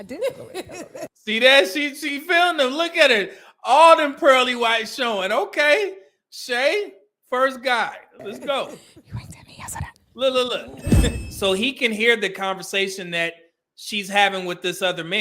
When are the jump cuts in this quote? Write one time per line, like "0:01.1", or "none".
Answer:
0:11.1